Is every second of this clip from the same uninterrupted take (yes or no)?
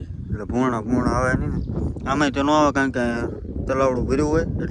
yes